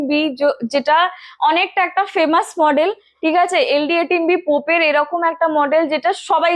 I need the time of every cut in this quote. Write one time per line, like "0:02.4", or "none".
none